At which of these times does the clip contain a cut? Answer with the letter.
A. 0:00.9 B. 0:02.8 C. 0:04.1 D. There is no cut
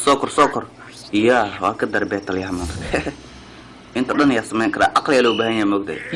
D